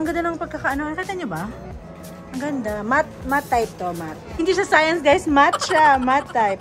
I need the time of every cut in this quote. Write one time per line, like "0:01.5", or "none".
0:04.3